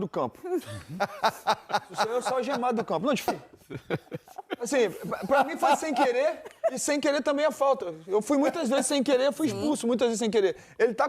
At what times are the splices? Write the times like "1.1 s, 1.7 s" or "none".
3.3 s